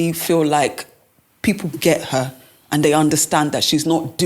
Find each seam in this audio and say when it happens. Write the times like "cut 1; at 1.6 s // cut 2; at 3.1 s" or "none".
none